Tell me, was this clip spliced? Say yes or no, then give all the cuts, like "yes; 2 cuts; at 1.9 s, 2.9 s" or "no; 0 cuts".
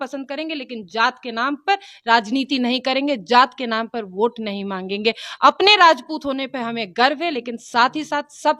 no; 0 cuts